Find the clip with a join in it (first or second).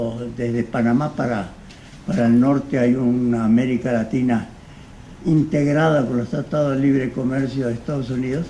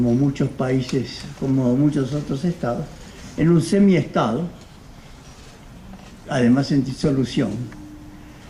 first